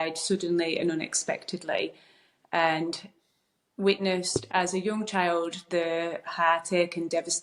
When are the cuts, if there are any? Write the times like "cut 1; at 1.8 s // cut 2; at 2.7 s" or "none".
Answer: none